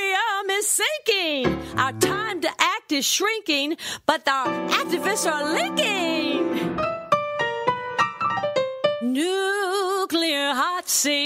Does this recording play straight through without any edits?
yes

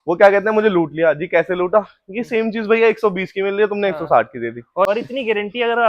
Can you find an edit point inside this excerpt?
yes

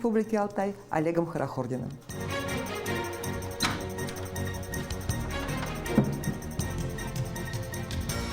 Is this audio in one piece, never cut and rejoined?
yes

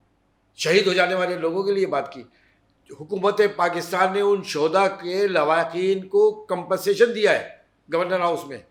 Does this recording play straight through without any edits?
yes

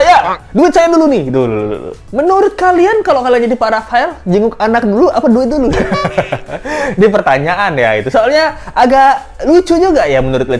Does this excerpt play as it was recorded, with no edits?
yes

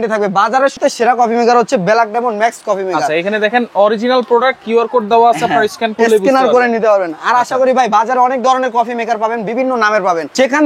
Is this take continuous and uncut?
yes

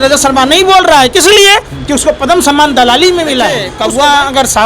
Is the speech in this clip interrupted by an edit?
yes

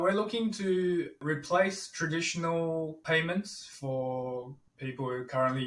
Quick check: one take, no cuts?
no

